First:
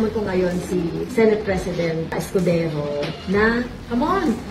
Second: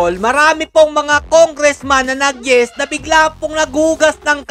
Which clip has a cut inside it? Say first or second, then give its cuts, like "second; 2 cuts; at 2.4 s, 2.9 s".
first; 2 cuts; at 1.0 s, 2.2 s